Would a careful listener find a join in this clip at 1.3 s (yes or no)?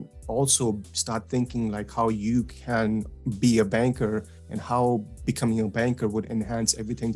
no